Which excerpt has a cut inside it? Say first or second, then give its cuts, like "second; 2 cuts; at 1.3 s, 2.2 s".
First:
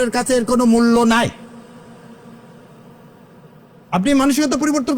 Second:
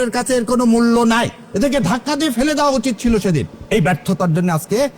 second; 2 cuts; at 1.4 s, 3.6 s